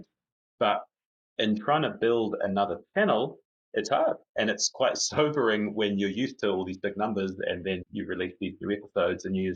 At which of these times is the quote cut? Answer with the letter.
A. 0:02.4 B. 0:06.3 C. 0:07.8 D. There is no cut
C